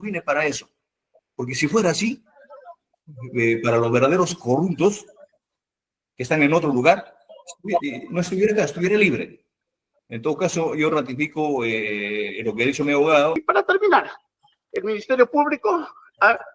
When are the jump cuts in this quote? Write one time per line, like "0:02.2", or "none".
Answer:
0:13.4

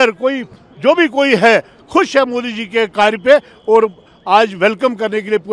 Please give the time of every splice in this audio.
none

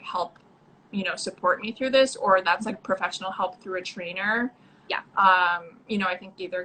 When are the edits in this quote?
none

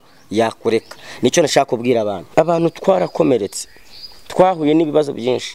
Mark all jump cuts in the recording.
0:02.2

